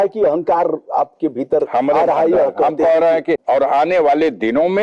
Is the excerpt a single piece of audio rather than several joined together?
no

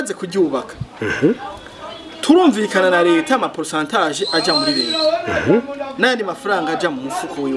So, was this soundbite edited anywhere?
no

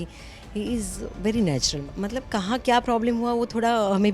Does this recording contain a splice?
yes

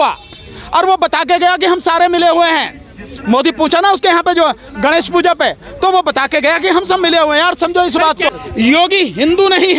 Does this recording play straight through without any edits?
no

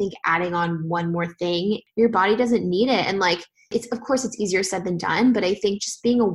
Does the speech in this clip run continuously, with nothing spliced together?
no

